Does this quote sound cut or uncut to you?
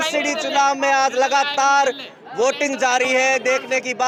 uncut